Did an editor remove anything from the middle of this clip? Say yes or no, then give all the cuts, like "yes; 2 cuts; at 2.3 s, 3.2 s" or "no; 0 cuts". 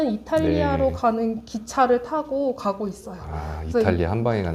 no; 0 cuts